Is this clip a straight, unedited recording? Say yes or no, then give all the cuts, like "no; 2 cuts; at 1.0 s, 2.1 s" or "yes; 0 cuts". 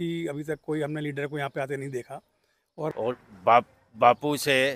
no; 1 cut; at 2.9 s